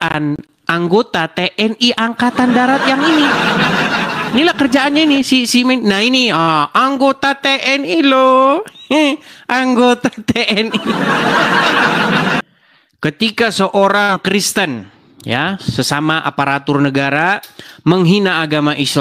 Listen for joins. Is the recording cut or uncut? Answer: cut